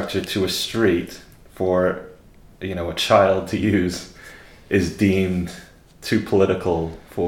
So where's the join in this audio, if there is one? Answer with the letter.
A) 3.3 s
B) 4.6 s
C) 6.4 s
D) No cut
D